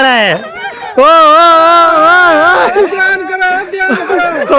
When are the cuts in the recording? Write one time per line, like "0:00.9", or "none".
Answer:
0:01.9